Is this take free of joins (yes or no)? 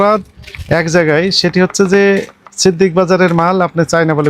yes